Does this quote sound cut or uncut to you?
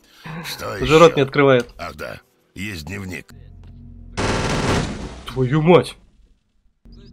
cut